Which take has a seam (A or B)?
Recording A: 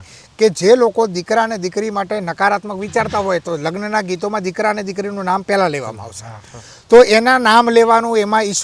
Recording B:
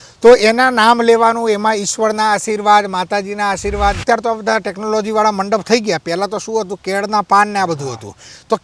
B